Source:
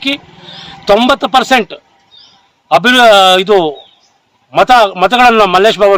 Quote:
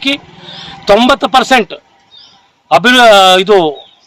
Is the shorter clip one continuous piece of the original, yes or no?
yes